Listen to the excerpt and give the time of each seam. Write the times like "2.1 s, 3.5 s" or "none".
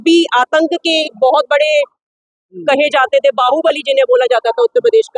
none